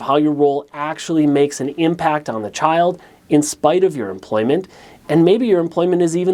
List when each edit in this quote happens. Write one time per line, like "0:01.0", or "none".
none